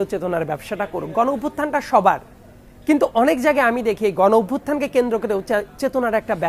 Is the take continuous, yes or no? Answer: yes